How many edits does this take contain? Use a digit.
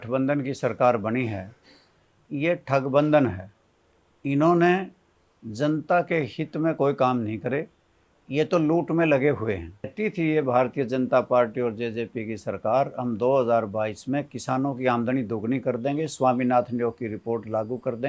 1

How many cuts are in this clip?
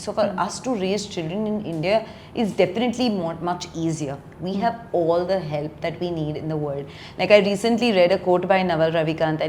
0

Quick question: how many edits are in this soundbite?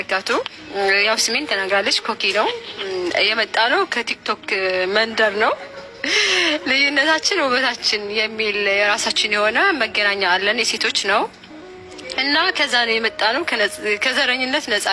0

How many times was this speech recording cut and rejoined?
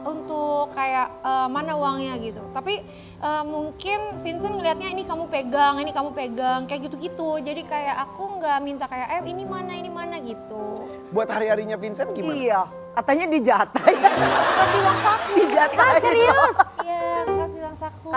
0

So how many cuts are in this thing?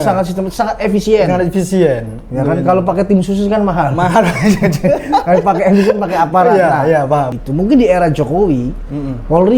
1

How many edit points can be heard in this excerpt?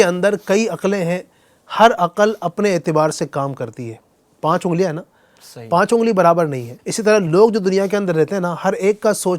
1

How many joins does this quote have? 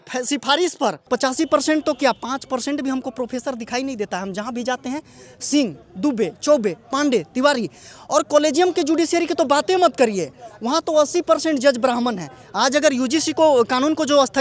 1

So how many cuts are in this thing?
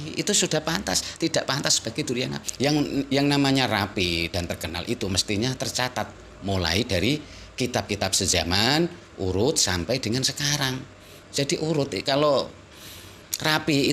1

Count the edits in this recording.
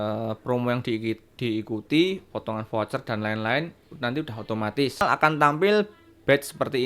1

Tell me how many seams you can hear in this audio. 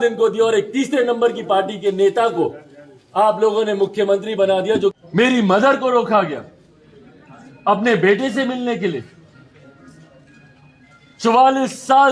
1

